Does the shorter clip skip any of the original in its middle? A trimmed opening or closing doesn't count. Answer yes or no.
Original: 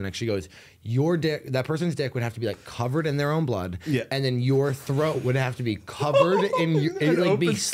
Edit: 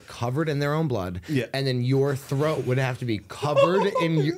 no